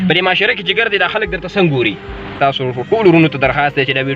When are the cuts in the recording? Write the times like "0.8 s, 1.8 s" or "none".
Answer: 2.3 s